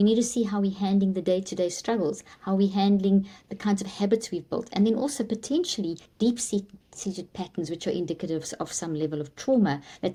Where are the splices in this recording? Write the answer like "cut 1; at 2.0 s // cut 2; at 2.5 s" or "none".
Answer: none